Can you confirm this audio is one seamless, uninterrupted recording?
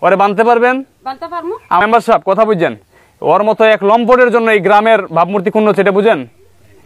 no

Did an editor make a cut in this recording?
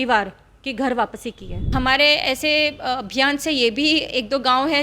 yes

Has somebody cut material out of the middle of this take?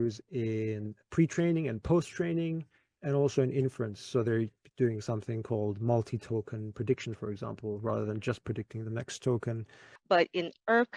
yes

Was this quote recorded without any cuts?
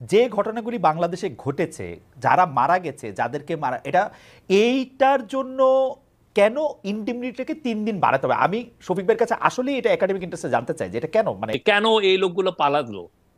no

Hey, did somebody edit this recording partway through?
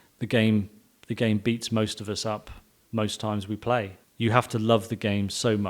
yes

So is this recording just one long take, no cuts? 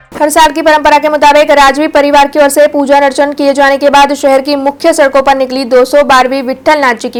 yes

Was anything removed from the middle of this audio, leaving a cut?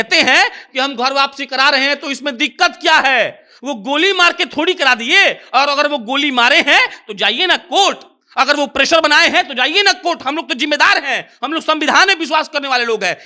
no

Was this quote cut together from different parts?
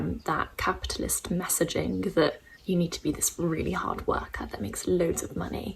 yes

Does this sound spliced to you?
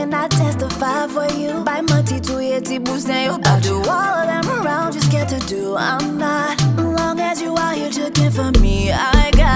no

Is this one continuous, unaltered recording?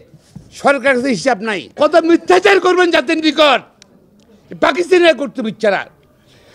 no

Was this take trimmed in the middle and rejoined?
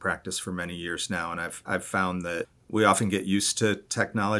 yes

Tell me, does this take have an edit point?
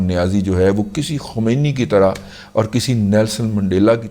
no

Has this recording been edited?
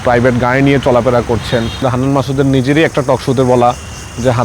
yes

